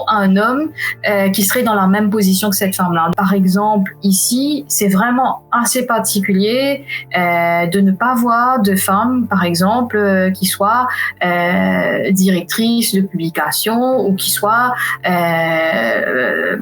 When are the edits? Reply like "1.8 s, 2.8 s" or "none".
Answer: 3.1 s